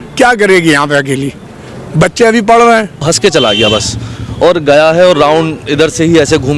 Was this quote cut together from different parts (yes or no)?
yes